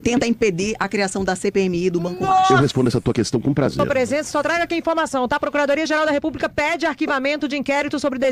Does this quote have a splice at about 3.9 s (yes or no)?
yes